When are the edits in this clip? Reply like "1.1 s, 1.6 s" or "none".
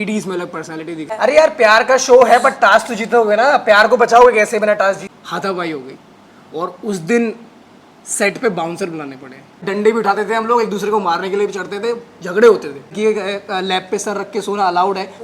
1.1 s, 5.0 s, 9.6 s, 12.9 s